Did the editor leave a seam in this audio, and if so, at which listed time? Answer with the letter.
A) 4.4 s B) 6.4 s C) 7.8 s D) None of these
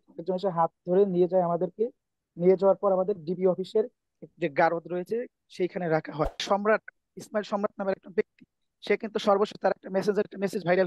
B